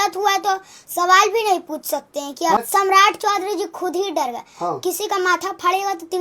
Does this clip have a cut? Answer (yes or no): yes